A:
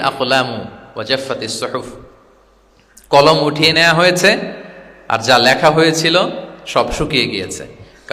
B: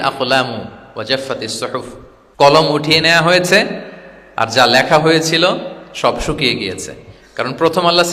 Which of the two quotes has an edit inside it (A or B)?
B